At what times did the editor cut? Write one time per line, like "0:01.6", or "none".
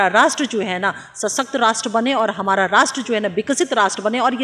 none